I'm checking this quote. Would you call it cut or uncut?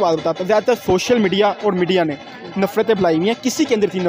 uncut